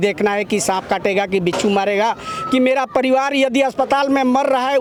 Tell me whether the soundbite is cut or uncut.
uncut